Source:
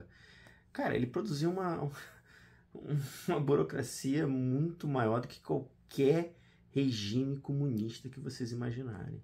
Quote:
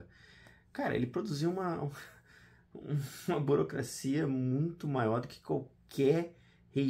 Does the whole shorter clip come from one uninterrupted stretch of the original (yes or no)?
yes